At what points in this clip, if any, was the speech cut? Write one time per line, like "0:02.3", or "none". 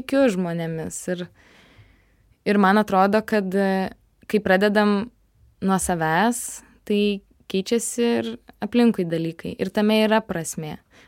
none